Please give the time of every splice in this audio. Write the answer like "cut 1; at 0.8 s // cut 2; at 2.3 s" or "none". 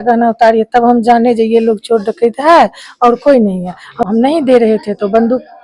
cut 1; at 4.0 s